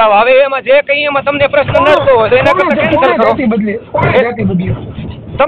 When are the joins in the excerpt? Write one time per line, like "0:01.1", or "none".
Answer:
none